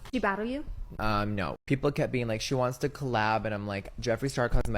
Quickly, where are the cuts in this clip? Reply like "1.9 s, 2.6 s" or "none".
1.5 s